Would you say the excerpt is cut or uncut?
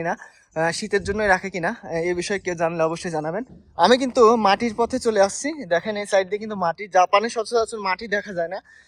cut